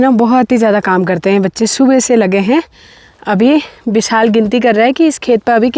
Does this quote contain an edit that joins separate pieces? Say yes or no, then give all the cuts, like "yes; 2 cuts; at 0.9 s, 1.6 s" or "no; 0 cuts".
no; 0 cuts